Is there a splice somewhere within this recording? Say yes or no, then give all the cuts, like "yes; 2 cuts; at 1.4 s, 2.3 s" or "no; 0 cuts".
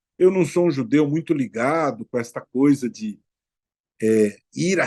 no; 0 cuts